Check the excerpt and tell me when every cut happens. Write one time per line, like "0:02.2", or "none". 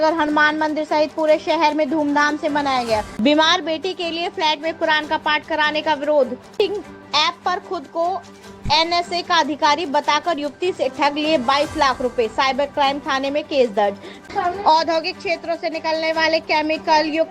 0:03.1
0:06.4
0:14.2